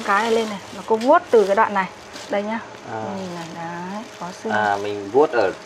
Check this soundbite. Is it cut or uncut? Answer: cut